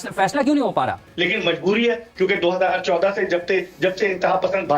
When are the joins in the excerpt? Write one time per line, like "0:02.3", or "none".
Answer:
0:01.1